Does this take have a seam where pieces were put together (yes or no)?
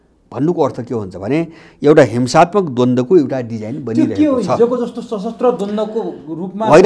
no